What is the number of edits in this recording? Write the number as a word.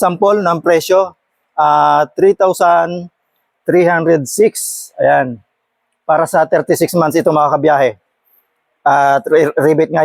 zero